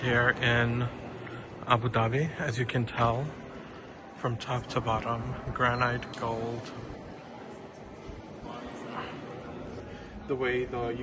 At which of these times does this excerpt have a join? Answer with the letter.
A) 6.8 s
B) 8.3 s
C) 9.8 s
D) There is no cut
C